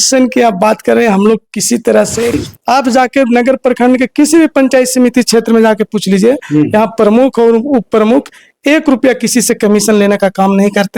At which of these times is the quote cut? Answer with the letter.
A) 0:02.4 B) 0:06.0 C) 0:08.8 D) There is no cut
A